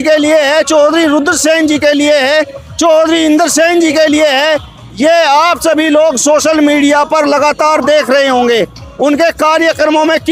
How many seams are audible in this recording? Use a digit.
0